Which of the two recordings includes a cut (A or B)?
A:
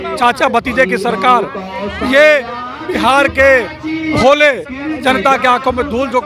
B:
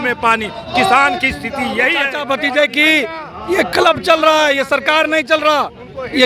B